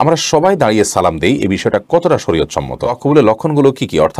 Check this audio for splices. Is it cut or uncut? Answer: cut